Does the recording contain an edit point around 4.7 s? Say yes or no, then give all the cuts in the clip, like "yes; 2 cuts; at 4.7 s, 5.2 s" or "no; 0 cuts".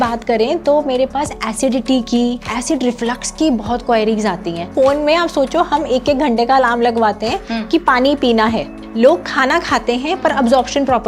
yes; 3 cuts; at 2.5 s, 4.7 s, 8.8 s